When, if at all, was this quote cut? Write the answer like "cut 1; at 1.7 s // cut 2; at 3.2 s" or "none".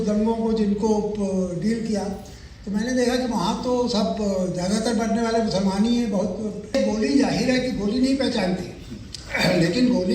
cut 1; at 6.8 s